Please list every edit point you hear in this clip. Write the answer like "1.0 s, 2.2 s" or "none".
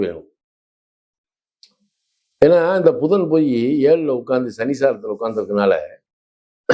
none